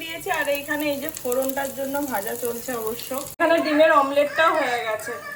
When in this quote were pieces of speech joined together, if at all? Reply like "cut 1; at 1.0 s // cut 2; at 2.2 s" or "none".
none